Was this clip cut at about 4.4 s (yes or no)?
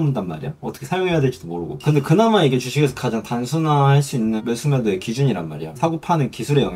yes